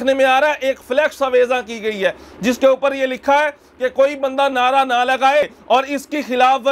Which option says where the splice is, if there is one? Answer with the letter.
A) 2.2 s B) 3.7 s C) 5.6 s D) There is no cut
C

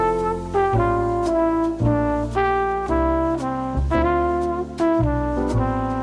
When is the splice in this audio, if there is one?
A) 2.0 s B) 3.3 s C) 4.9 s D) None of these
D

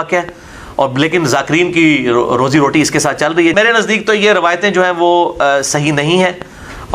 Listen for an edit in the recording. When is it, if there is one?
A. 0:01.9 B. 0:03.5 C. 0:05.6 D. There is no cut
B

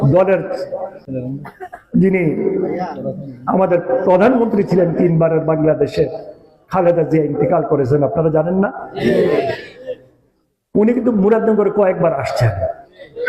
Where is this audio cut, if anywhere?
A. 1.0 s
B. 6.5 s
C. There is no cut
A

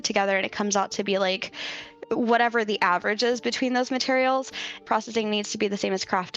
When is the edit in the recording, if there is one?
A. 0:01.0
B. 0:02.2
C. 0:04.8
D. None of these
C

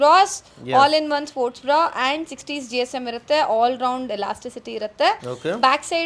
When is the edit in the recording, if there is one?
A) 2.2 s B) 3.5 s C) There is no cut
C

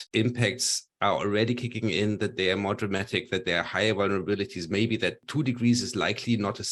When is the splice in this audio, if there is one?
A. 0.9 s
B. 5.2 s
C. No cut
B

